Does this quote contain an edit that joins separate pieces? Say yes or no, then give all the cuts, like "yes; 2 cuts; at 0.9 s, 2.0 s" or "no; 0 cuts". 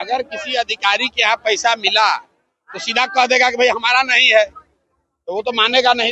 no; 0 cuts